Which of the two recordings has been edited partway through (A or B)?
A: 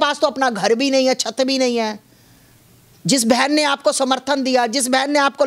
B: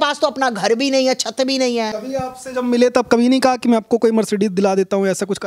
B